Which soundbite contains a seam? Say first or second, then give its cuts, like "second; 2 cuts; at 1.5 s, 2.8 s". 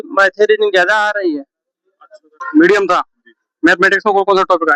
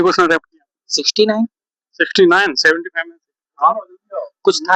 first; 1 cut; at 2.3 s